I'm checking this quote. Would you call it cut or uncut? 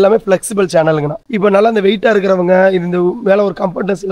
cut